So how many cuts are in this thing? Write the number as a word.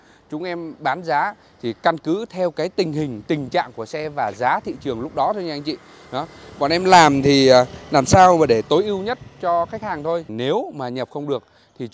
one